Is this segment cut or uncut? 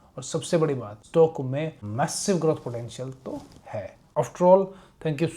cut